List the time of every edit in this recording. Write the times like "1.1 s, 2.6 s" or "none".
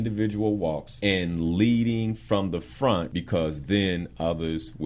0.9 s, 3.1 s